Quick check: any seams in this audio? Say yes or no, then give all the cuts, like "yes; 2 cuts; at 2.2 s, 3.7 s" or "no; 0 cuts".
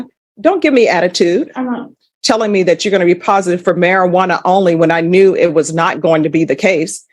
yes; 1 cut; at 2.1 s